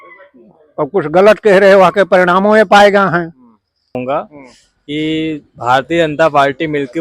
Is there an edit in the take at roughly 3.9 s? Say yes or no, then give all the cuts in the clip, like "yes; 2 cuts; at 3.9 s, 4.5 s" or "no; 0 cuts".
yes; 1 cut; at 3.9 s